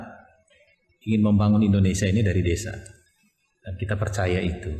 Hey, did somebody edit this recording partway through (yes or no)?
yes